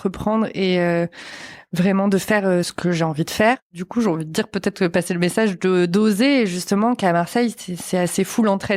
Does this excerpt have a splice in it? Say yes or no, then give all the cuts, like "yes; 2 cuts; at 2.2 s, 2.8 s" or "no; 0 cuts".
yes; 2 cuts; at 2.7 s, 3.8 s